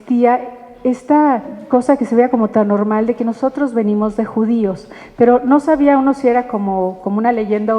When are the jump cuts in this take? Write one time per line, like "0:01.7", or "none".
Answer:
0:01.5